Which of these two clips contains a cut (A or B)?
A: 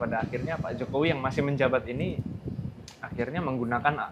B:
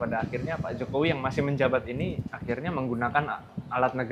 B